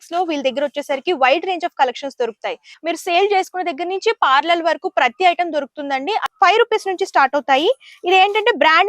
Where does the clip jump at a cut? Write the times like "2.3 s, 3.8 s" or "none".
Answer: 2.7 s, 6.2 s